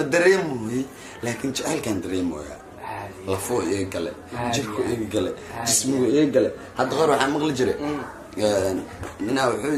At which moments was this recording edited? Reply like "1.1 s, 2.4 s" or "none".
none